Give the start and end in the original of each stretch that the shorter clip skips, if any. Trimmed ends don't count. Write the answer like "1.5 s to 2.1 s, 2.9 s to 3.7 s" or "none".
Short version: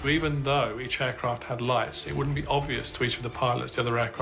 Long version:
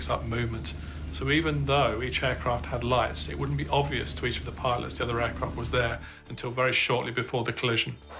none